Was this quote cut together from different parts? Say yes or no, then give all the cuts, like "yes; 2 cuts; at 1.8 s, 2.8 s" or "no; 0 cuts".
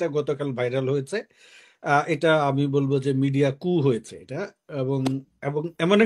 no; 0 cuts